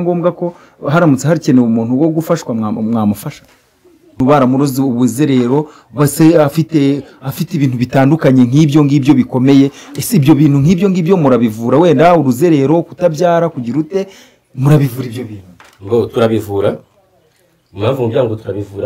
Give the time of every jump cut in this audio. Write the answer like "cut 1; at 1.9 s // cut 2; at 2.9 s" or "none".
cut 1; at 4.2 s